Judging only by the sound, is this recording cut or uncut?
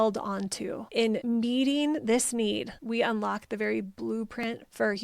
cut